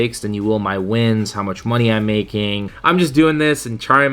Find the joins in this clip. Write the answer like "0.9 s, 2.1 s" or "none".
2.7 s